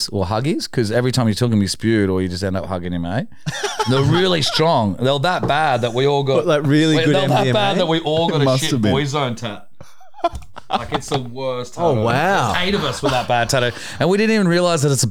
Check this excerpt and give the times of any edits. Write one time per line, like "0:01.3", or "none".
none

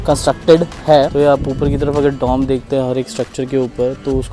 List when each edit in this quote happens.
0:01.1

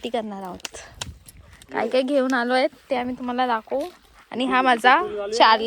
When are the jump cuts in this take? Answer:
none

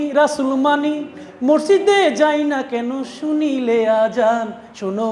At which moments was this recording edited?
none

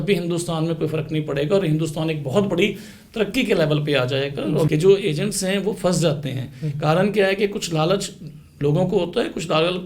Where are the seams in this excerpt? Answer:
0:04.7

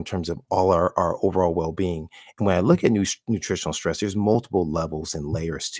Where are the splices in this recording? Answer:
none

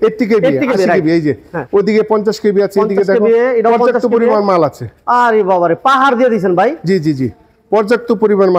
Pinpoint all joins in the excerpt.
none

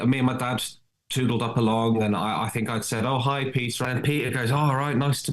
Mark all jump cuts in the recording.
0:03.8

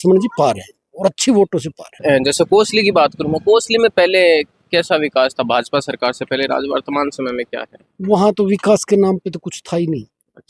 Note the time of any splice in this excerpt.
0:02.0

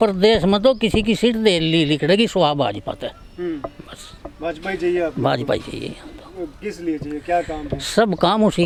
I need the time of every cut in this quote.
none

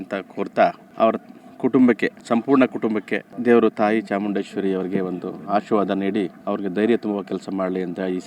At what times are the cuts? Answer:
0:06.4

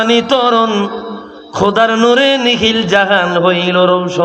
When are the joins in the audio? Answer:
none

